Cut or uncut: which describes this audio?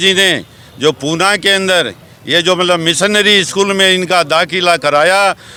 uncut